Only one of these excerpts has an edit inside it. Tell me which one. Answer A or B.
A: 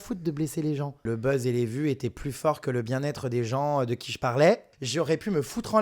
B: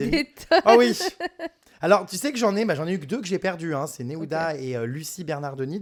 A